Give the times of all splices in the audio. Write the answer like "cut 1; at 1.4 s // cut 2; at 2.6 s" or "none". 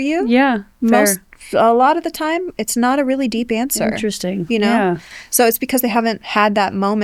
none